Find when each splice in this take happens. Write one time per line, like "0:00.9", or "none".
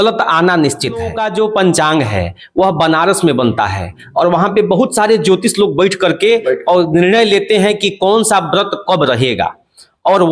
0:01.2

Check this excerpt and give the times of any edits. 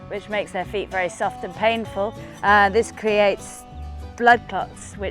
0:02.3

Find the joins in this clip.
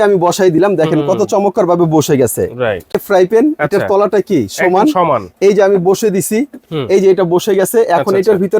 0:03.0

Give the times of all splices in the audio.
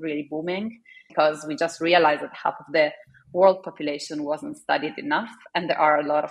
0:01.1

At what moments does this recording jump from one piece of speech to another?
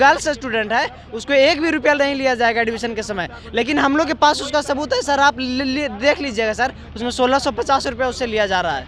none

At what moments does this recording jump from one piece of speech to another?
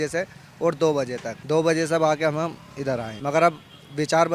0:01.3
0:03.1

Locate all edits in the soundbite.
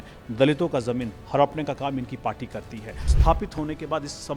0:03.1

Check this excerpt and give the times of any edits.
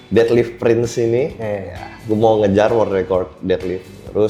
none

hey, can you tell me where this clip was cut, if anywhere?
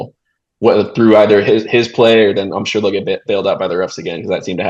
none

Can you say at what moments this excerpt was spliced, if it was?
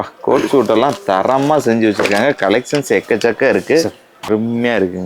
0:04.1

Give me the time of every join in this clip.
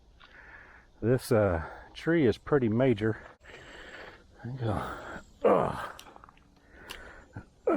0:03.4

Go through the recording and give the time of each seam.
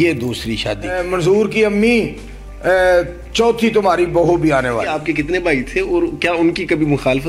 0:01.0
0:04.9

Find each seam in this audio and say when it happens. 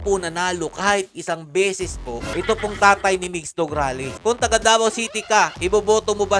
0:02.3
0:04.2

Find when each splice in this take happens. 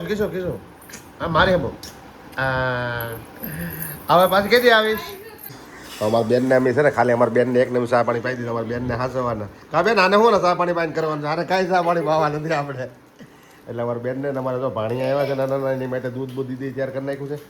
0:05.6

